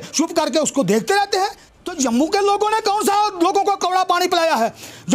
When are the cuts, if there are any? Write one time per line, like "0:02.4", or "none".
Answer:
0:01.7